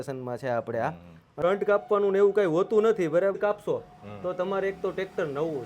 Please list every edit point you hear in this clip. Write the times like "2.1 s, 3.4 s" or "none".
1.4 s, 3.4 s